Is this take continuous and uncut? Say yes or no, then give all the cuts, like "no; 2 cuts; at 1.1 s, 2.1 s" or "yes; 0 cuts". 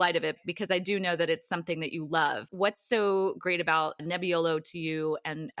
yes; 0 cuts